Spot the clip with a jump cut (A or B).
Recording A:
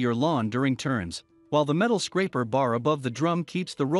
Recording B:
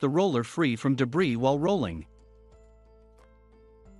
B